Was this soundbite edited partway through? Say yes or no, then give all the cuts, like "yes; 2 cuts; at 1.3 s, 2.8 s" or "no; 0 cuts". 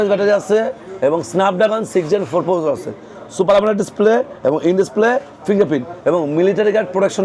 no; 0 cuts